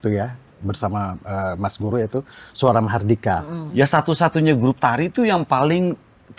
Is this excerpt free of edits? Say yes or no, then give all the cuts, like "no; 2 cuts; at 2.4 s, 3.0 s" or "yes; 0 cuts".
no; 1 cut; at 3.6 s